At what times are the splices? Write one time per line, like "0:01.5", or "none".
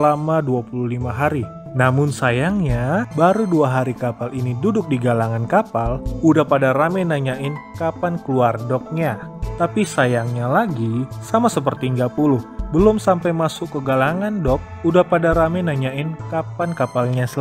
0:09.4